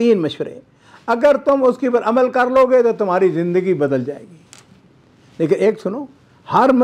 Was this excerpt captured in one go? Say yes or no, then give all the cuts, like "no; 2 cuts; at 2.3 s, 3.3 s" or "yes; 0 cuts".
yes; 0 cuts